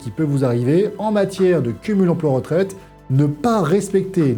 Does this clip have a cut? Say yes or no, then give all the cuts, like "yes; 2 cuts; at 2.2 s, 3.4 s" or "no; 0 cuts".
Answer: no; 0 cuts